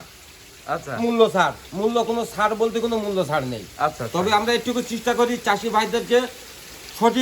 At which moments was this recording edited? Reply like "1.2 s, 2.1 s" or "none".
4.0 s